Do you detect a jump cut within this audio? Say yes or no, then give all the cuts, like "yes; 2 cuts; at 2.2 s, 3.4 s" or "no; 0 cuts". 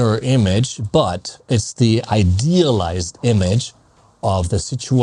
no; 0 cuts